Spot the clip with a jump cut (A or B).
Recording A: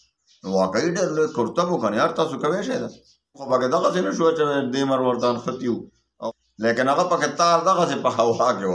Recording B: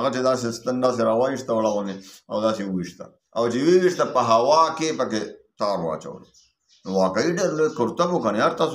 A